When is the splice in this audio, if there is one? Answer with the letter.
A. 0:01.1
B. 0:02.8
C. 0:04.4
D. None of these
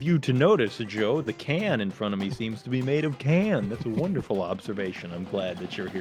D